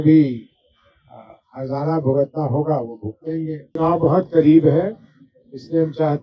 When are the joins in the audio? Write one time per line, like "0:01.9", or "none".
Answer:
0:03.7